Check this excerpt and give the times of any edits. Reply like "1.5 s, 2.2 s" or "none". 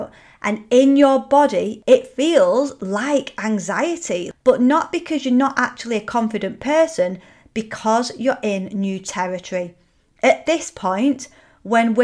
1.7 s, 4.3 s